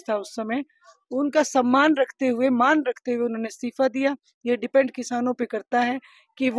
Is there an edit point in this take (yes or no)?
no